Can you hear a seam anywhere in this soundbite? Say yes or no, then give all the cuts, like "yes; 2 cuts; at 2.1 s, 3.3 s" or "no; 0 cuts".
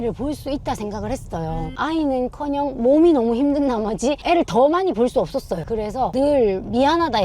yes; 2 cuts; at 1.7 s, 6.1 s